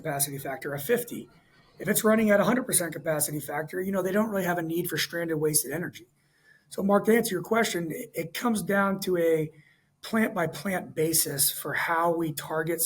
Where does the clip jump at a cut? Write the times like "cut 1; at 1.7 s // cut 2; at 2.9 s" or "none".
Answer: none